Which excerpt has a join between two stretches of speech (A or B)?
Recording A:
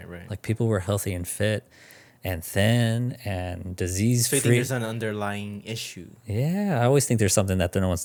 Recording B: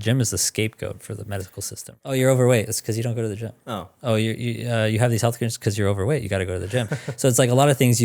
B